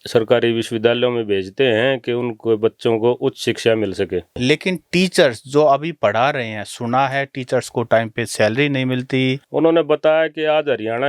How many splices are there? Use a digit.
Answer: 2